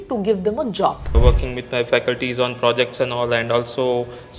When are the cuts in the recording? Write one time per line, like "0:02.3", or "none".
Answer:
0:01.2

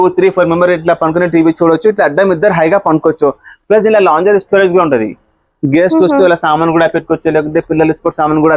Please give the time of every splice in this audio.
none

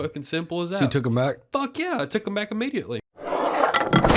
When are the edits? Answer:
0:03.1

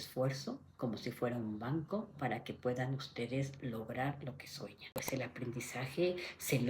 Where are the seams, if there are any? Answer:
0:05.1

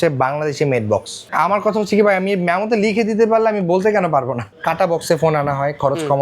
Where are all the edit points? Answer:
0:01.2
0:04.5

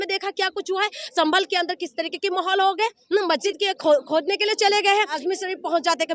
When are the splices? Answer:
0:03.4
0:05.2

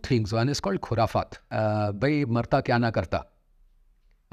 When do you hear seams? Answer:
0:01.4

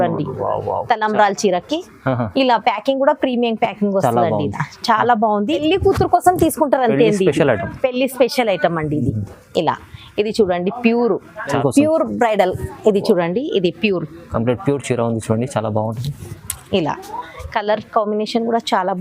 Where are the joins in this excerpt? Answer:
0:05.6
0:11.6

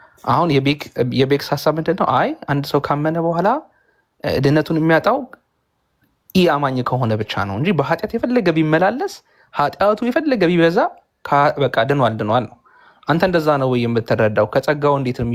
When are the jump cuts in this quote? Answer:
none

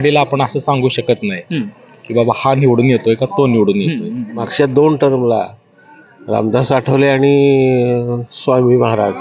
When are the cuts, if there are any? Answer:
0:04.5

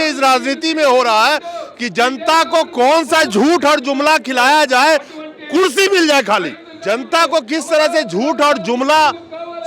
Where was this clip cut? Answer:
none

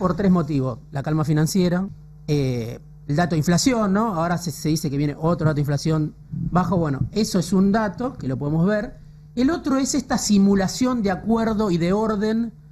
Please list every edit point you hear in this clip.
0:02.0

